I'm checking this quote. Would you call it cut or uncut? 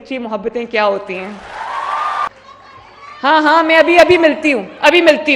cut